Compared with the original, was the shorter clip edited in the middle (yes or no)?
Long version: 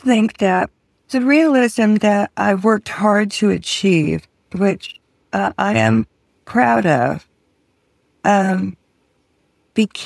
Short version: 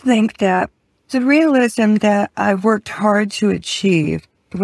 no